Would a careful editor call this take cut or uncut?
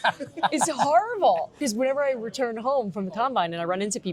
cut